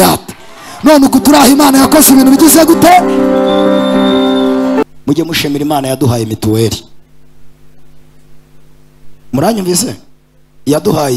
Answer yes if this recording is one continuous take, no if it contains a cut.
no